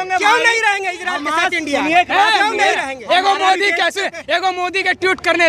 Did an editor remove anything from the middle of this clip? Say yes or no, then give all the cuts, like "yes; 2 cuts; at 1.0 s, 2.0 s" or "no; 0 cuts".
no; 0 cuts